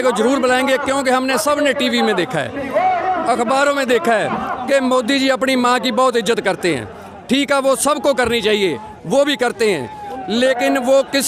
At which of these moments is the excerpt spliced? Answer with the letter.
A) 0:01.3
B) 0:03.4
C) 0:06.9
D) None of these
D